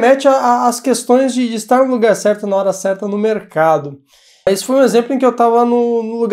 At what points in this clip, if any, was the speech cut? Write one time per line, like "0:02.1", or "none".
0:04.3